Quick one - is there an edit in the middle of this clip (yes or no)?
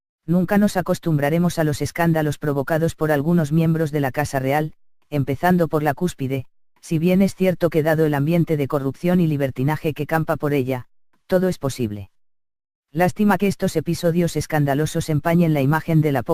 yes